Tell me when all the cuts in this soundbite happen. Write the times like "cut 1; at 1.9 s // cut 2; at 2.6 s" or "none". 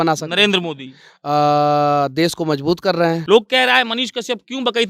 cut 1; at 3.2 s